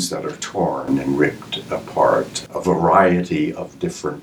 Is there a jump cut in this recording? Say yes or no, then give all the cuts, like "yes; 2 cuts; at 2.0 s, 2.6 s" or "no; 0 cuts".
yes; 1 cut; at 2.5 s